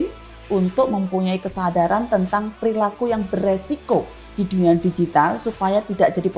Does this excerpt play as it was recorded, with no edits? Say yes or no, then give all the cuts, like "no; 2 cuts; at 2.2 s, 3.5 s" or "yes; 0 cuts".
yes; 0 cuts